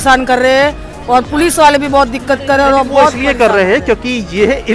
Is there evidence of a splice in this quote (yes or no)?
no